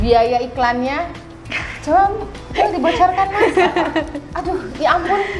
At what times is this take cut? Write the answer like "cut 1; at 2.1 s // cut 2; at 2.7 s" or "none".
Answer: none